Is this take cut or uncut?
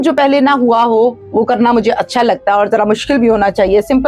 uncut